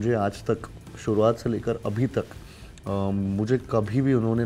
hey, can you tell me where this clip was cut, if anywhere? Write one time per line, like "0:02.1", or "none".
none